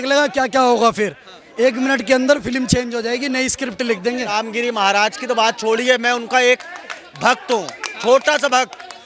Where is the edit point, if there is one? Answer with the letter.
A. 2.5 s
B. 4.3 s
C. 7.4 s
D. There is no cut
B